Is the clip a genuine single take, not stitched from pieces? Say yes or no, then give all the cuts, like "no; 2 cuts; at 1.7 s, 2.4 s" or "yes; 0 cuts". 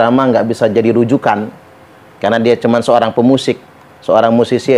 yes; 0 cuts